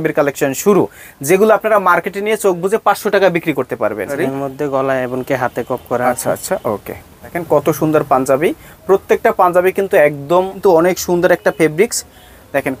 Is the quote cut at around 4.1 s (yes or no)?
yes